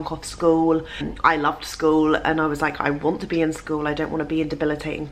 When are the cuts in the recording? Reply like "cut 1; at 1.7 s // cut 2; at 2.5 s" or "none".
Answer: none

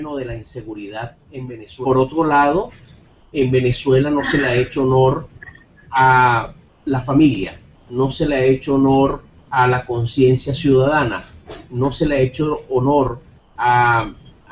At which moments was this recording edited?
none

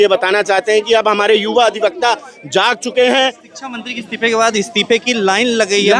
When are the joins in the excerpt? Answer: cut 1; at 3.5 s

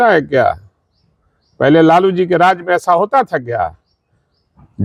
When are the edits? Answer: none

